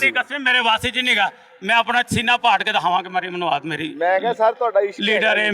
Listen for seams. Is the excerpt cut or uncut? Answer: uncut